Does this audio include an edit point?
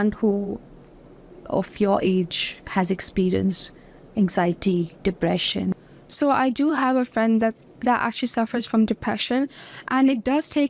yes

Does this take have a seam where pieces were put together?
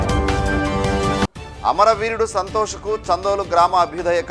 yes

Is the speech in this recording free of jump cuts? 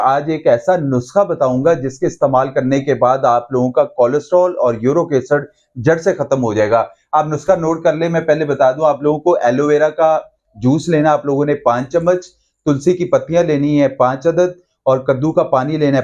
yes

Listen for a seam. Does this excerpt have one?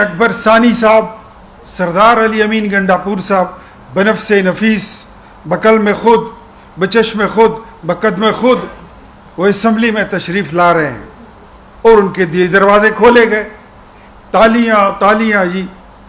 no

